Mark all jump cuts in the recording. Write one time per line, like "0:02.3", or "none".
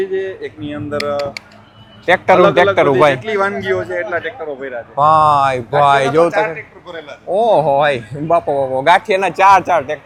none